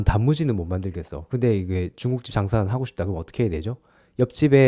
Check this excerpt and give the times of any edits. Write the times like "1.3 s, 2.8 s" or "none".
none